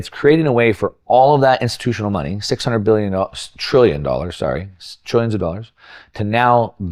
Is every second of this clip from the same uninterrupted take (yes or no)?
yes